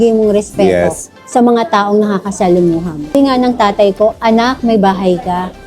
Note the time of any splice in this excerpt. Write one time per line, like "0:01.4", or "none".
0:03.2